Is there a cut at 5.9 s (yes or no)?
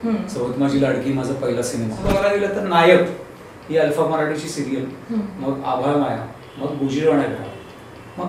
no